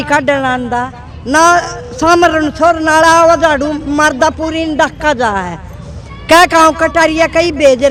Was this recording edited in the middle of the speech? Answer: no; 0 cuts

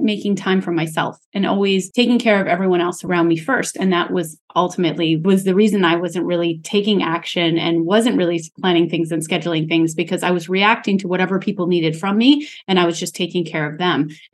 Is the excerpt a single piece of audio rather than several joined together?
no; 3 cuts; at 1.9 s, 3.1 s, 5.2 s

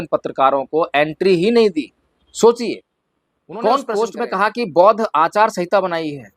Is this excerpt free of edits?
no; 1 cut; at 4.2 s

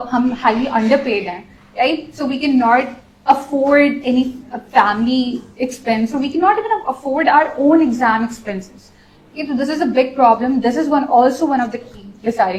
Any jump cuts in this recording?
no; 0 cuts

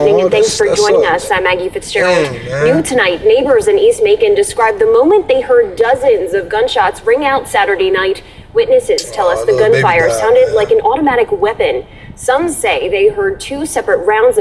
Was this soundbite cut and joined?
no; 0 cuts

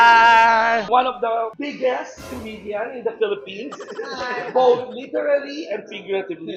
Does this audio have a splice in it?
no; 0 cuts

